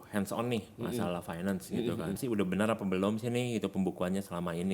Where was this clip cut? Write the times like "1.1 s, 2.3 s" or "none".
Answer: 2.2 s